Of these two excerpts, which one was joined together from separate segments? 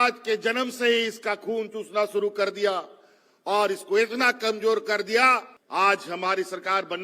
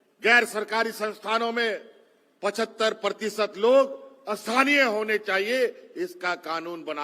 first; 1 cut; at 5.6 s

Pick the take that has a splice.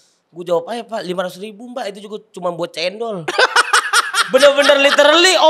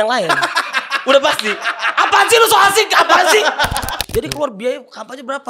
second; 1 cut; at 3.9 s

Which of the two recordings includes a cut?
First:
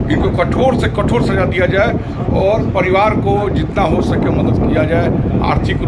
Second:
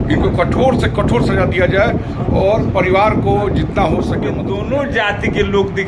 second; 1 cut; at 4.5 s

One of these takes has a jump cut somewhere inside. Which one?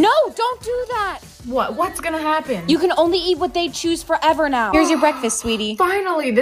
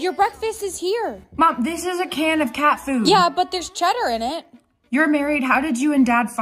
first; 1 cut; at 4.7 s

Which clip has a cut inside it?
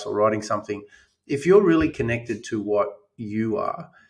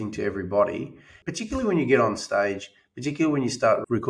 second; 1 cut; at 1.2 s

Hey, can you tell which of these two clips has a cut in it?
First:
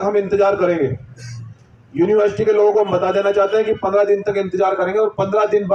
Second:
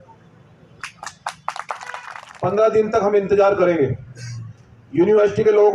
second; 1 cut; at 2.1 s

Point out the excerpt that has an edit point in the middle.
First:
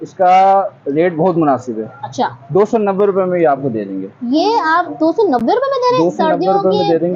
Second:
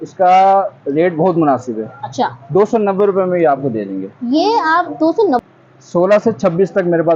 second; 1 cut; at 5.4 s

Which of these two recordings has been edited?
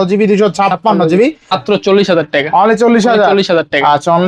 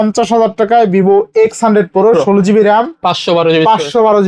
first; 1 cut; at 1.6 s

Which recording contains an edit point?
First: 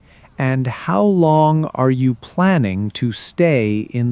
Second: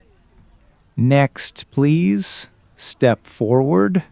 second; 1 cut; at 0.9 s

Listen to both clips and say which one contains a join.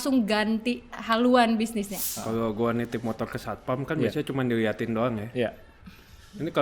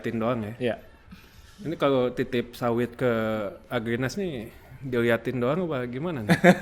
first; 1 cut; at 2.0 s

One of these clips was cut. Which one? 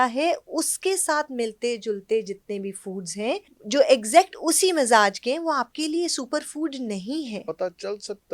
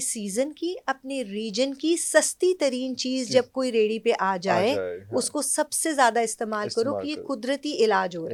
first; 2 cuts; at 3.5 s, 7.4 s

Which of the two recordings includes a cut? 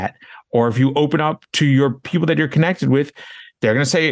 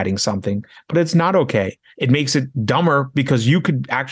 second; 1 cut; at 1.8 s

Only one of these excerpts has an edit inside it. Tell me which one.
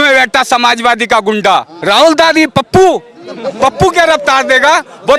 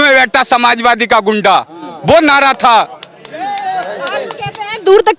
first; 1 cut; at 1.7 s

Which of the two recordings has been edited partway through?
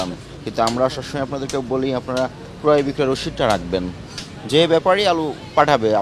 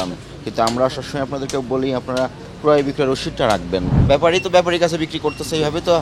second; 1 cut; at 3.9 s

